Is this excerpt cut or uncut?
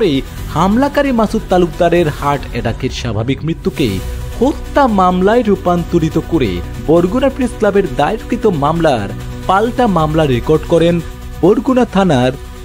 cut